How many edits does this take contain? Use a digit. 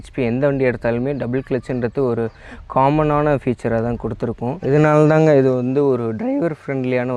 1